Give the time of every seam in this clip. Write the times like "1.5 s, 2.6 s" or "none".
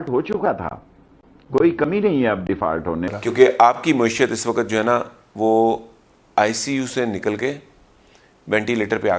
3.1 s